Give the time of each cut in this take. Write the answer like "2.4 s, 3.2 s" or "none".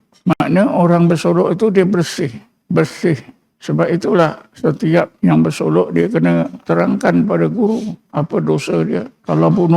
5.1 s, 6.6 s